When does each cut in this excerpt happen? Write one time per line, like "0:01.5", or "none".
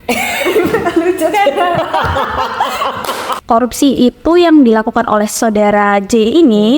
0:03.3